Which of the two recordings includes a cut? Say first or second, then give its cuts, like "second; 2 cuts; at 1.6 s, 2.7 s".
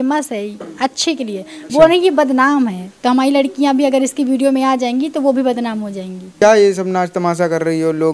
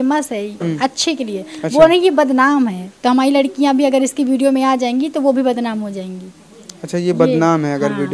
first; 1 cut; at 6.2 s